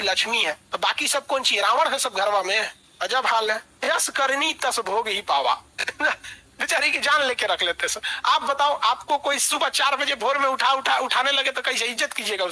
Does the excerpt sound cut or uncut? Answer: uncut